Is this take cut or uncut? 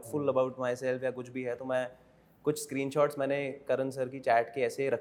uncut